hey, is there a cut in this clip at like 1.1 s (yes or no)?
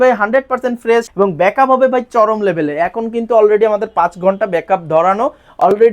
yes